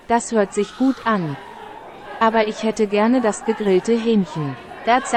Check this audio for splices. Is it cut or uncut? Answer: uncut